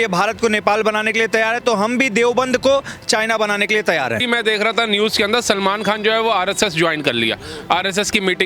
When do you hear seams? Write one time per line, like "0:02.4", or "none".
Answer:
0:04.2